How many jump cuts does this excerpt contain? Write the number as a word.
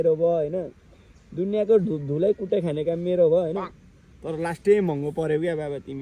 zero